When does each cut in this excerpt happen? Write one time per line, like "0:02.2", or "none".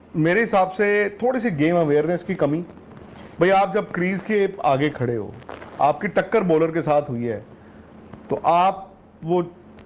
none